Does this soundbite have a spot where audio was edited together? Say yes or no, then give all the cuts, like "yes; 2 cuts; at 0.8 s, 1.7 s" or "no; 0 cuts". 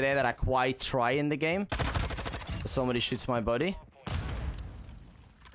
no; 0 cuts